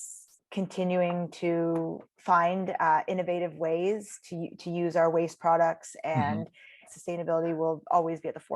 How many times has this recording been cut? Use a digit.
2